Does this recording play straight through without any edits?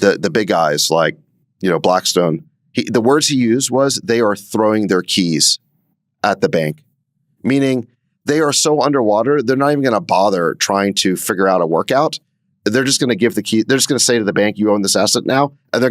yes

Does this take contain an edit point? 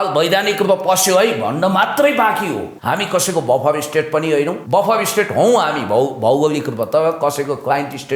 yes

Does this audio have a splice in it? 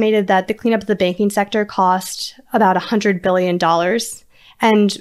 no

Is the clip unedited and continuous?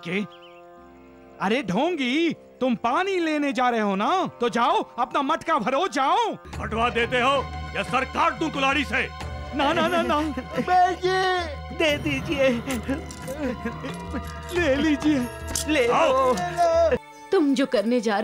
no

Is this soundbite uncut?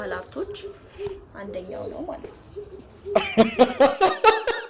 no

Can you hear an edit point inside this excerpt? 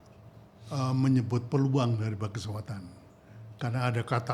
no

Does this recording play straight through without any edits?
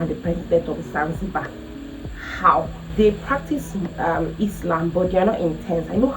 no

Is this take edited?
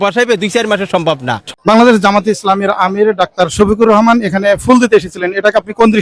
yes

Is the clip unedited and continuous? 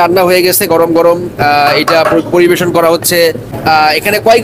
no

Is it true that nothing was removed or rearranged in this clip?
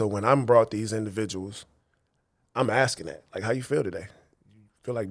yes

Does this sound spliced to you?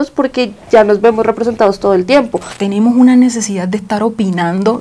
yes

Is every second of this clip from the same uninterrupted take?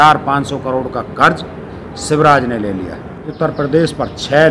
no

